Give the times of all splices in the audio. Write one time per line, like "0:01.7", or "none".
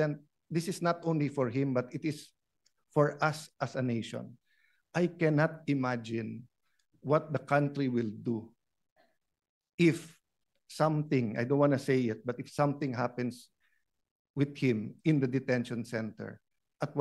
none